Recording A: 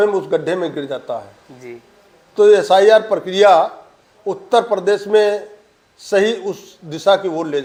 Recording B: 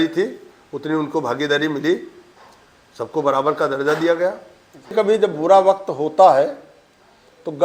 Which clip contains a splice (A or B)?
B